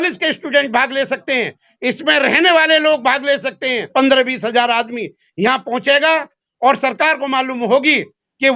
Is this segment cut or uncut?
cut